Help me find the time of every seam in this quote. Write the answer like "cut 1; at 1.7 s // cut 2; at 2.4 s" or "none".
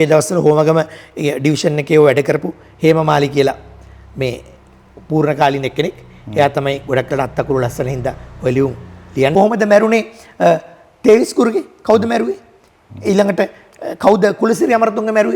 cut 1; at 9.3 s